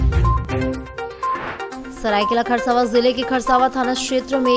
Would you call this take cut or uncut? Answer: cut